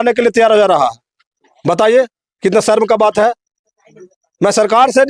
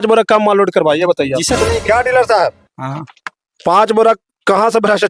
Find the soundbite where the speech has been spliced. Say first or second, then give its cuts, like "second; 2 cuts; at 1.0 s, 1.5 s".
second; 1 cut; at 1.6 s